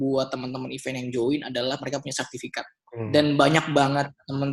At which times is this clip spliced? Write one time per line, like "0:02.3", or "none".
0:02.8

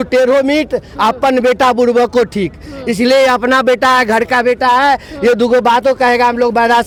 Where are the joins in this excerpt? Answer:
none

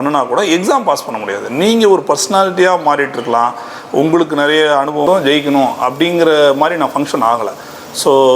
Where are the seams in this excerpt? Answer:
0:05.0

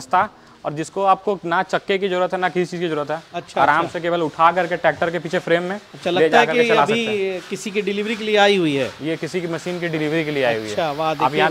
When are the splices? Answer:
none

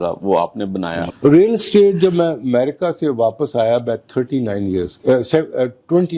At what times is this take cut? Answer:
0:01.1

